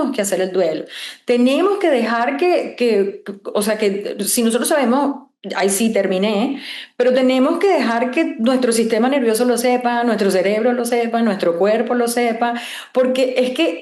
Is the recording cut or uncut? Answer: uncut